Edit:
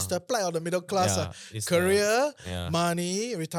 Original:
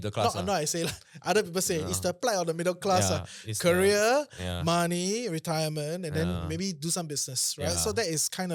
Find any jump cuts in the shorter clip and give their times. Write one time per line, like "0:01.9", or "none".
none